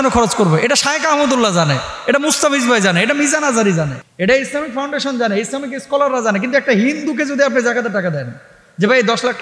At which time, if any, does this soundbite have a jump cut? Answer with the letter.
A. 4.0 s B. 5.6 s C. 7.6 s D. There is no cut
A